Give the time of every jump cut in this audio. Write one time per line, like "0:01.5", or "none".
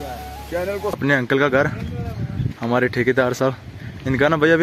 0:01.0